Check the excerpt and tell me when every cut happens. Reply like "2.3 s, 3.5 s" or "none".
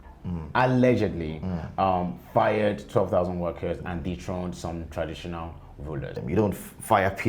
6.2 s